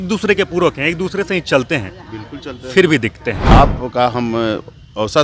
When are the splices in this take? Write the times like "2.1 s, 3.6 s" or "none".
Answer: 3.5 s